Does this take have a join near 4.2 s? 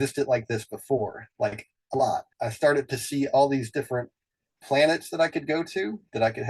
no; 1 cut; at 2.3 s

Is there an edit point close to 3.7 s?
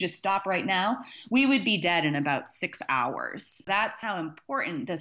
yes; 1 cut; at 3.7 s

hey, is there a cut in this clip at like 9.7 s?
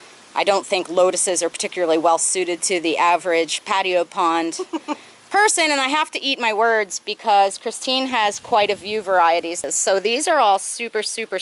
yes; 1 cut; at 9.7 s

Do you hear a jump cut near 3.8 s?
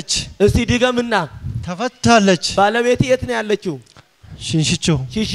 no; 0 cuts

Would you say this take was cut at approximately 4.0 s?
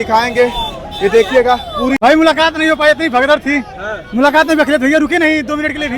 no; 1 cut; at 2.0 s

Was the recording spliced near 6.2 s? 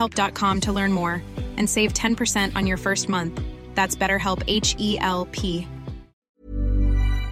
yes; 1 cut; at 6.2 s

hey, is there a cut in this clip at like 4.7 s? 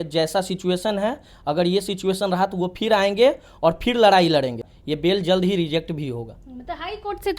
yes; 1 cut; at 4.7 s

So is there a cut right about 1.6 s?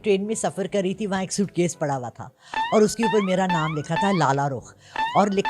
no; 0 cuts

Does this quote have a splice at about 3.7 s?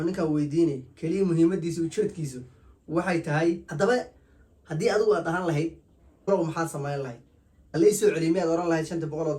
yes; 2 cuts; at 3.7 s, 6.3 s

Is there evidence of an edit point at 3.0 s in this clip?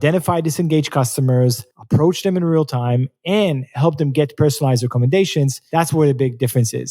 no; 2 cuts; at 1.7 s, 5.6 s

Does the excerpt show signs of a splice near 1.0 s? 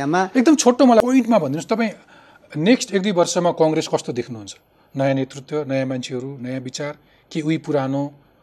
yes; 1 cut; at 1.0 s

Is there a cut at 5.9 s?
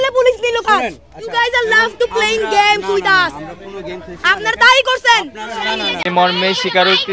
yes; 1 cut; at 5.9 s

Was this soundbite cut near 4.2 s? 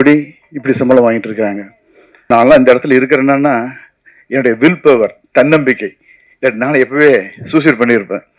no; 1 cut; at 2.1 s

